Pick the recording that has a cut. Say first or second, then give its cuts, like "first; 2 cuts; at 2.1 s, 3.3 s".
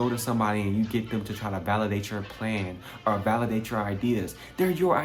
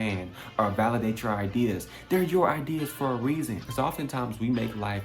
second; 1 cut; at 3.6 s